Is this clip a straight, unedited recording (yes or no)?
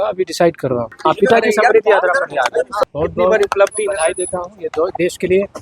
no